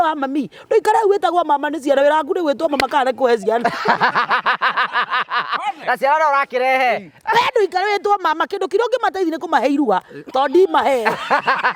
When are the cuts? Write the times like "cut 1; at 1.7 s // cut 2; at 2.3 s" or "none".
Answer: none